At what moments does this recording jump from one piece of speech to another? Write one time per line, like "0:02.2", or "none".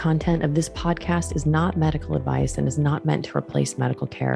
none